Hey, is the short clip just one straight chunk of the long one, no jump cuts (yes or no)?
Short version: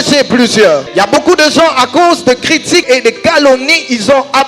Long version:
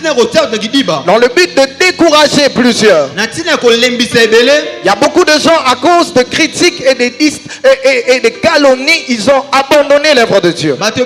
no